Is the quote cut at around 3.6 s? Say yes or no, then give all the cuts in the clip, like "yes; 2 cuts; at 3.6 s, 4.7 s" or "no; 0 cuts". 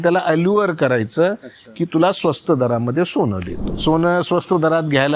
yes; 1 cut; at 3.6 s